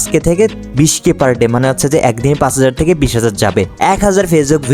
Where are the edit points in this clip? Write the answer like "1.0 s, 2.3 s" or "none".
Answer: 3.7 s